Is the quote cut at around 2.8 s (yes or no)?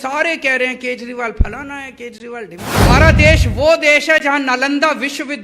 yes